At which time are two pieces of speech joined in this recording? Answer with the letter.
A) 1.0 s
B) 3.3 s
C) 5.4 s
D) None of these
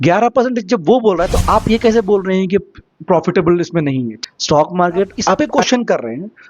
C